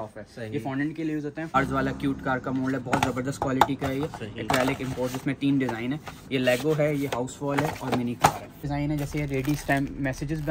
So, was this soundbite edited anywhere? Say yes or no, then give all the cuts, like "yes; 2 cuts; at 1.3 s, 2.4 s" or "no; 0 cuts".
yes; 2 cuts; at 1.6 s, 8.7 s